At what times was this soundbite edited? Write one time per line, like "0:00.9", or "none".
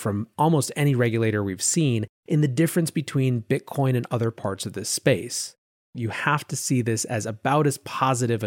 0:06.0

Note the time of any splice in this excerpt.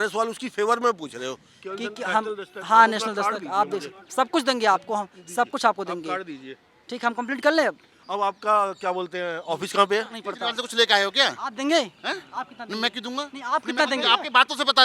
0:01.6
0:10.3

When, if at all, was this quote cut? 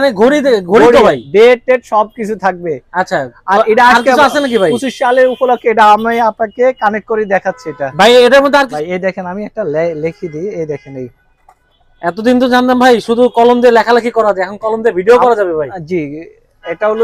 0:08.7

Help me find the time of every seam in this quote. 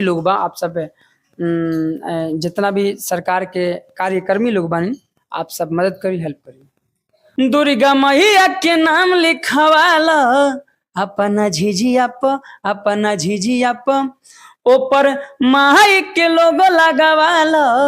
0:07.2

